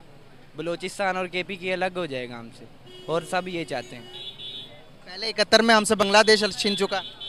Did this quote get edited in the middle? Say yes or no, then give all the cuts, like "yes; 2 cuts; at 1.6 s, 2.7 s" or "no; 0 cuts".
no; 0 cuts